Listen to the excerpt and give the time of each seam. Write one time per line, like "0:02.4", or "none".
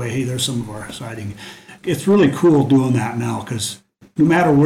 0:01.7